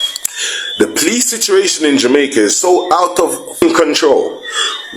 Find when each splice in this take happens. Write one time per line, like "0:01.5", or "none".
0:03.5